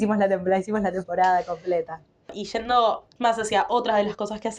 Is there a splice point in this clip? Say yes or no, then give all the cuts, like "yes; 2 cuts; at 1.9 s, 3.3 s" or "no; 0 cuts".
no; 0 cuts